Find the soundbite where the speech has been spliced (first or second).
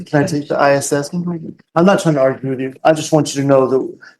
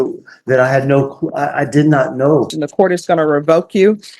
second